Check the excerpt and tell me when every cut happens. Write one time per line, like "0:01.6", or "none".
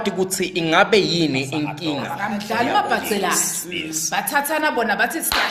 0:02.1